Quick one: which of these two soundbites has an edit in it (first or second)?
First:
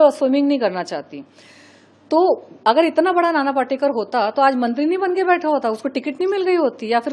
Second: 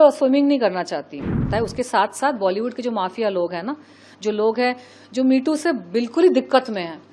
second